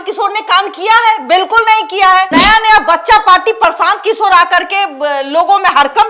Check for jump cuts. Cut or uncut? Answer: cut